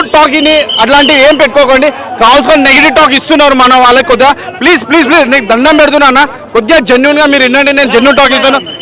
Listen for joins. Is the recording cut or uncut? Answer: uncut